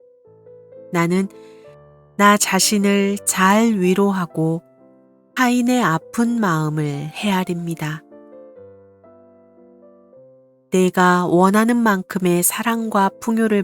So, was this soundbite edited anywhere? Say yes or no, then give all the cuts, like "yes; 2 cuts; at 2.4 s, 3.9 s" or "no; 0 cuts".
yes; 1 cut; at 0.9 s